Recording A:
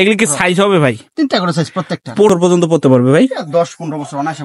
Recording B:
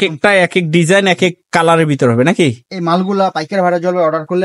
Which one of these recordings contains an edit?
A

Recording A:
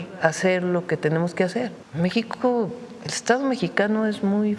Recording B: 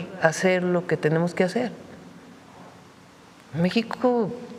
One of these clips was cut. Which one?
A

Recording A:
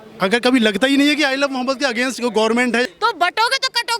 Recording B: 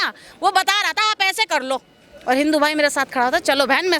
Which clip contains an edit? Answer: A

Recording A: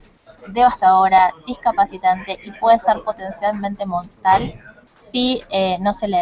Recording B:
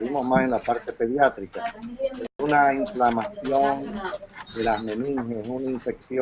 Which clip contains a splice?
A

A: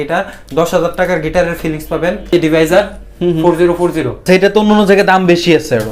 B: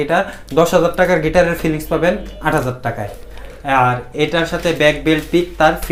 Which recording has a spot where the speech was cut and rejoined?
A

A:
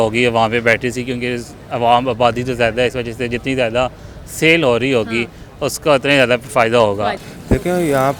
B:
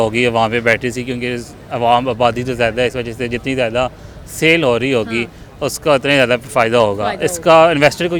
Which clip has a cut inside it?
A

